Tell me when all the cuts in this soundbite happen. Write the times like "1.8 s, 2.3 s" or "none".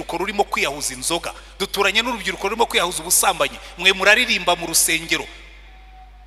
none